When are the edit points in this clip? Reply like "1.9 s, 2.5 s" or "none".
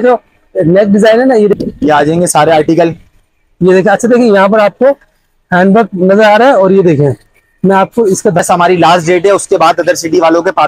1.5 s, 8.4 s